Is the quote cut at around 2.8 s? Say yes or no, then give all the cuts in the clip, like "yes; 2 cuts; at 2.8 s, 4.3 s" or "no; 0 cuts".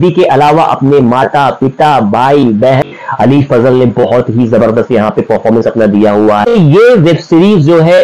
yes; 2 cuts; at 2.8 s, 6.5 s